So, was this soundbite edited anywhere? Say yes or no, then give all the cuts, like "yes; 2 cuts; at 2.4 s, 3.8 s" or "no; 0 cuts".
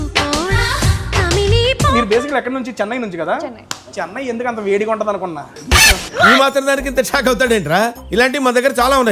yes; 2 cuts; at 1.9 s, 3.9 s